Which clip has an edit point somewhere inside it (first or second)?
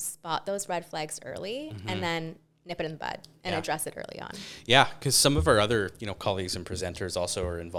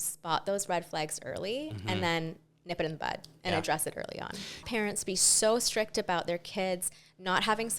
second